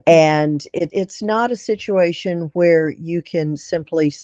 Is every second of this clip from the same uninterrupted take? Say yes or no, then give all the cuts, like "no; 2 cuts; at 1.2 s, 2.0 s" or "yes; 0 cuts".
no; 1 cut; at 0.9 s